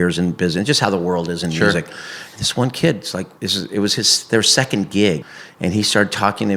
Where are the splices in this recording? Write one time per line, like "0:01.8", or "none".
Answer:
0:03.3
0:05.2